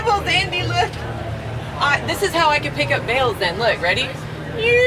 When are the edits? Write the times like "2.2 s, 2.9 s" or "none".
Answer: none